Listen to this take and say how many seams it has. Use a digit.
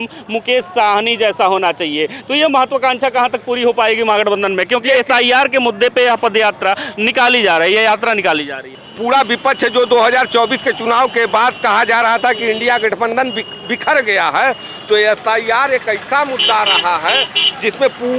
1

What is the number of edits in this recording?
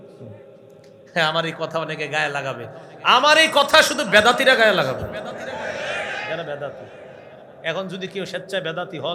0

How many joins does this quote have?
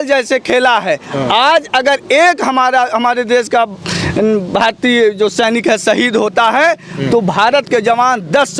0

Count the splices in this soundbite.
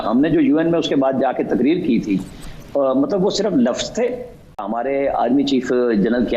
1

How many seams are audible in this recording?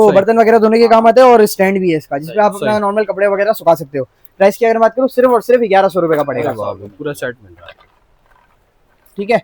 0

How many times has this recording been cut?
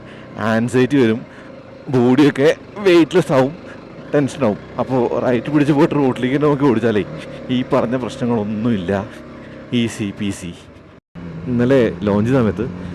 1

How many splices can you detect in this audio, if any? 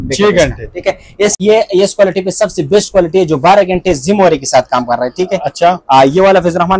1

